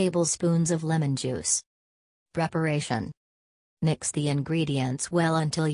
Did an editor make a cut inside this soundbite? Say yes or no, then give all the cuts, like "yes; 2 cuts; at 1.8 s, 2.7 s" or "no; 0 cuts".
no; 0 cuts